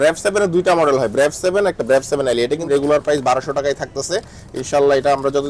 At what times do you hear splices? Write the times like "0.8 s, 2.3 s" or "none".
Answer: 2.6 s

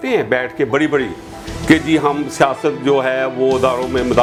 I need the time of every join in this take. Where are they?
none

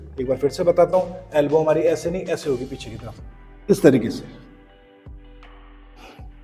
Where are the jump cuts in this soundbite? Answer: none

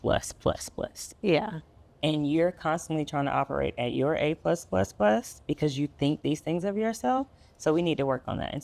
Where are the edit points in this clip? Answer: none

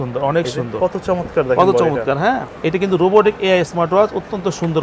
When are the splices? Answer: 2.5 s

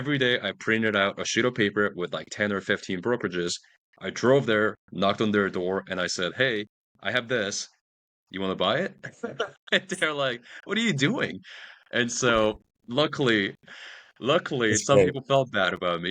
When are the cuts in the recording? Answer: none

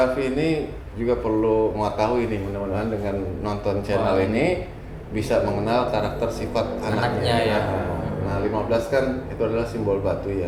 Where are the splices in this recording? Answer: none

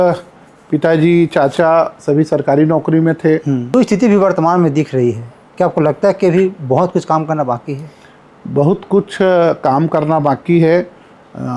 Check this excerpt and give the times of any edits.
3.7 s

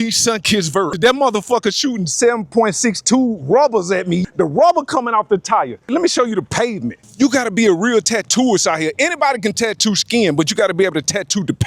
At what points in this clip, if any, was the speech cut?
0.9 s, 4.2 s, 5.9 s, 7.0 s

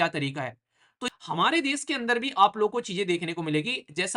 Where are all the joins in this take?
1.0 s

